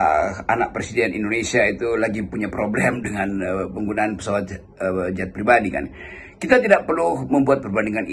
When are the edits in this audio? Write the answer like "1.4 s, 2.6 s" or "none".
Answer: none